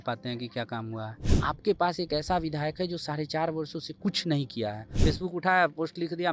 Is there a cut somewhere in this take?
yes; 2 cuts; at 1.2 s, 4.9 s

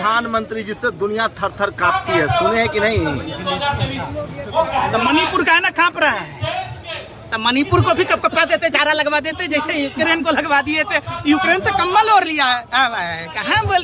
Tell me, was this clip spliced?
no; 0 cuts

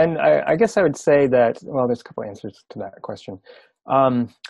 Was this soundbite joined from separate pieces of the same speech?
no; 0 cuts

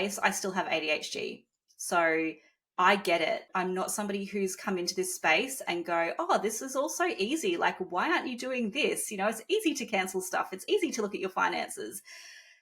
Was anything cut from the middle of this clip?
yes; 1 cut; at 3.4 s

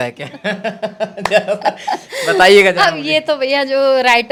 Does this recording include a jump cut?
no; 0 cuts

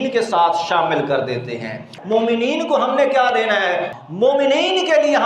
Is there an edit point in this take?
yes; 2 cuts; at 1.9 s, 3.9 s

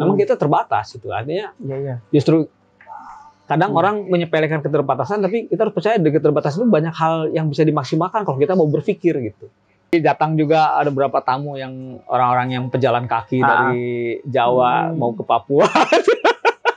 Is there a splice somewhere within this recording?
yes; 1 cut; at 9.9 s

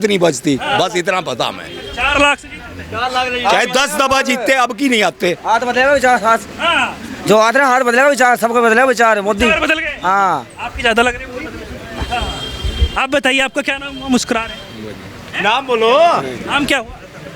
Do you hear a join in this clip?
no; 0 cuts

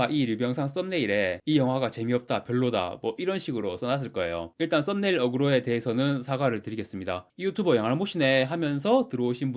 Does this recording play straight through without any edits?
yes; 0 cuts

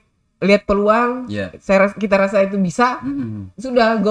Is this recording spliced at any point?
no; 0 cuts

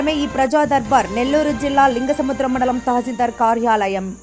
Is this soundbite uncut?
yes; 0 cuts

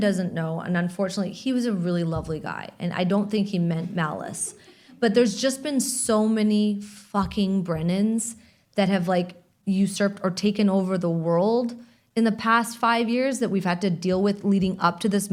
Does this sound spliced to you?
no; 0 cuts

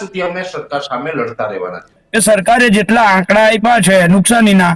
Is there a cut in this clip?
yes; 1 cut; at 1.9 s

